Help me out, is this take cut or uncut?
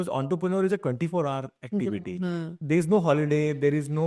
uncut